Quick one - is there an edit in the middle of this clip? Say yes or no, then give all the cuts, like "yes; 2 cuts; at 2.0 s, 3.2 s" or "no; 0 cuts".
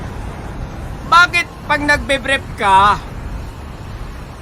no; 0 cuts